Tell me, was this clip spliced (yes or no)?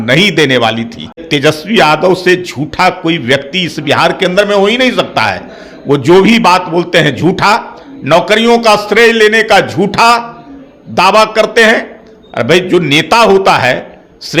yes